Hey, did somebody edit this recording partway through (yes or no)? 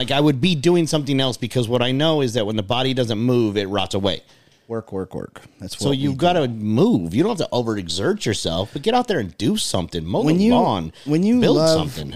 no